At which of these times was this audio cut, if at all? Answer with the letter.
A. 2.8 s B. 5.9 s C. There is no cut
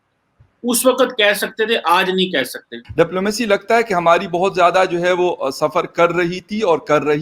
A